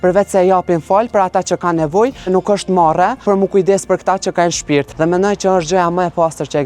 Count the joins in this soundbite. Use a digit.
3